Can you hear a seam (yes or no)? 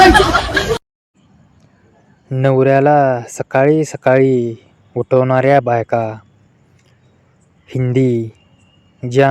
yes